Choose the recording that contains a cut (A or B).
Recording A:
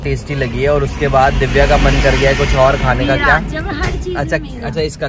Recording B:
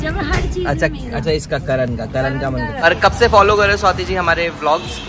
B